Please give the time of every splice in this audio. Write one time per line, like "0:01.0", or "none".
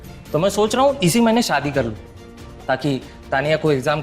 none